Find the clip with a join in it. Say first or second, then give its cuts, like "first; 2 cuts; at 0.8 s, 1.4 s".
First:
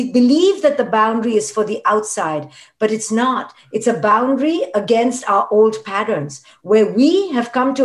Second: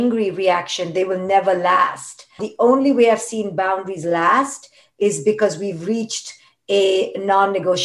second; 1 cut; at 2.5 s